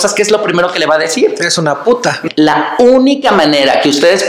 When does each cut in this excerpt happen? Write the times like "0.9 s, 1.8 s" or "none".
2.2 s